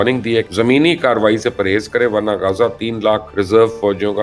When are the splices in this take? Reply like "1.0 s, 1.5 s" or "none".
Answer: 3.3 s